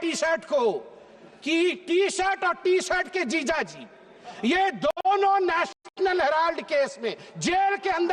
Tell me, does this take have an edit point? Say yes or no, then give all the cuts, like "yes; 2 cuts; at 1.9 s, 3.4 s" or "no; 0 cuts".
no; 0 cuts